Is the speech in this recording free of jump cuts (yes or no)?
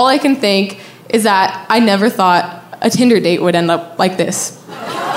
yes